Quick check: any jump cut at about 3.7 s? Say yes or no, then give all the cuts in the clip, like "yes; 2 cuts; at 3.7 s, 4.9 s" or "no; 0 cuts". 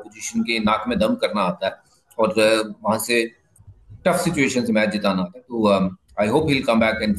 no; 0 cuts